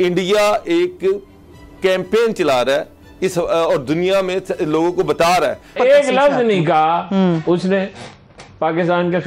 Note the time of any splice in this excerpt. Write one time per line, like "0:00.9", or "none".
0:05.7